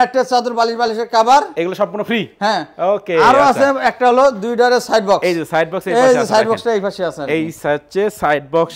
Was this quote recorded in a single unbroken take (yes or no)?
yes